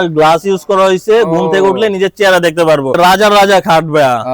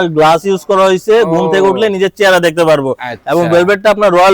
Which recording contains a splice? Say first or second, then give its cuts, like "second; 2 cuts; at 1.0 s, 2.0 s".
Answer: first; 1 cut; at 3.0 s